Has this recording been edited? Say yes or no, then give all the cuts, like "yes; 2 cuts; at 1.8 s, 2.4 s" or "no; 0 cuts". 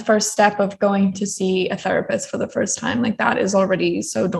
no; 0 cuts